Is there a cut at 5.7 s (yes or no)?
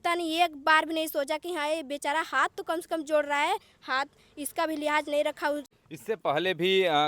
yes